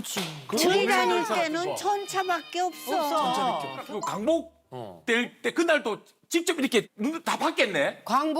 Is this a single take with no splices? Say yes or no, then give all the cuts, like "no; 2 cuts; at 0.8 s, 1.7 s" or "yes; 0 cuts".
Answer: no; 1 cut; at 3.9 s